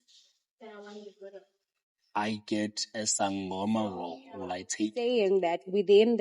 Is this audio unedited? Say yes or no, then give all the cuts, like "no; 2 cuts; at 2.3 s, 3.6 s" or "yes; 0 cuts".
no; 1 cut; at 5.0 s